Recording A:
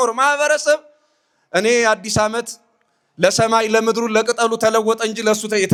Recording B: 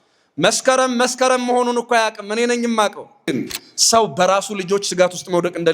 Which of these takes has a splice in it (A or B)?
B